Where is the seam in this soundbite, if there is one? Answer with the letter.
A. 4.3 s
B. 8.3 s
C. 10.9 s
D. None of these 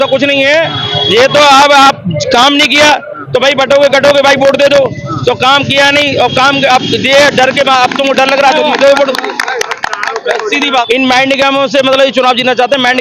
C